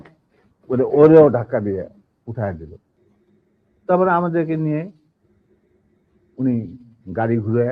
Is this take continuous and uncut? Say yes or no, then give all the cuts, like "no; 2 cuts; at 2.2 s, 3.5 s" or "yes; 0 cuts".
yes; 0 cuts